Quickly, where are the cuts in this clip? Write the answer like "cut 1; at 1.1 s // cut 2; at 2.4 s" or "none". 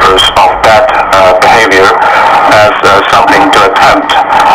none